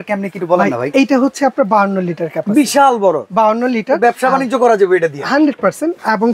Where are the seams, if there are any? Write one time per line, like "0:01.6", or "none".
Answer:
none